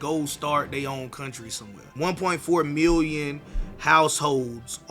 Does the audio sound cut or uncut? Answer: cut